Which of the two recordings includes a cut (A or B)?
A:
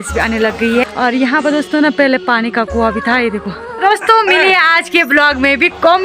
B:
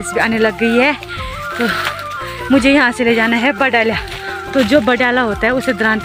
A